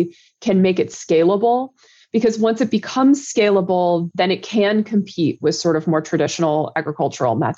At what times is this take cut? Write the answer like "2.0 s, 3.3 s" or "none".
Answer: none